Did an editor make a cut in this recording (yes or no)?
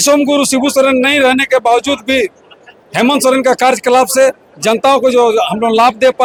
no